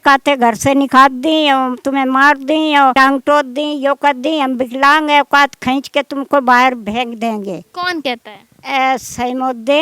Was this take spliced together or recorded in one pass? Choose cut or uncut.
cut